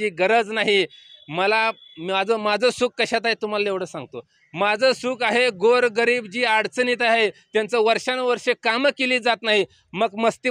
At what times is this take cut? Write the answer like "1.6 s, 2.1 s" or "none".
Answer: none